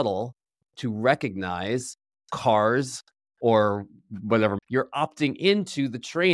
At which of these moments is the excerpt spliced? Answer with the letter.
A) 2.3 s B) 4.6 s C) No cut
B